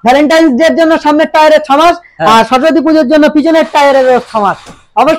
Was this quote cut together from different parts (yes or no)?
no